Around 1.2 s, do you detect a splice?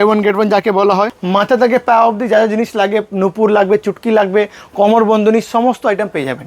yes; 1 cut; at 1.2 s

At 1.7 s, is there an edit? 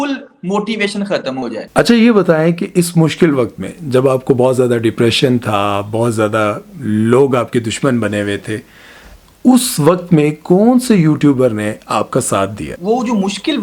yes; 2 cuts; at 1.7 s, 12.7 s

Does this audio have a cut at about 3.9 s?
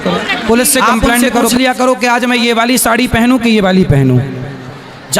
no; 1 cut; at 1.5 s

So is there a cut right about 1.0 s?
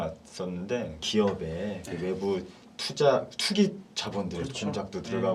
yes; 1 cut; at 1.0 s

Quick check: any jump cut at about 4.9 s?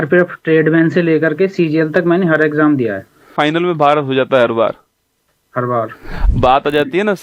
no; 2 cuts; at 3.3 s, 6.2 s

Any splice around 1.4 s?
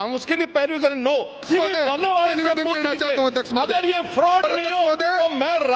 yes; 1 cut; at 1.4 s

